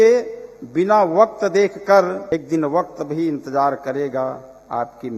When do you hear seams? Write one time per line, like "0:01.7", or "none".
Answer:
0:02.3